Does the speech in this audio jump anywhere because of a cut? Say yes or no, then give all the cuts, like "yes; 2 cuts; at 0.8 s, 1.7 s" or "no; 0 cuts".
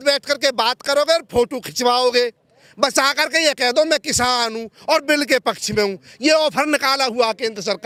no; 0 cuts